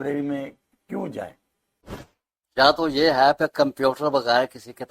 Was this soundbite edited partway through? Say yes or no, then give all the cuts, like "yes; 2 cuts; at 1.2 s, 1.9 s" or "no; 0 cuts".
yes; 1 cut; at 2.1 s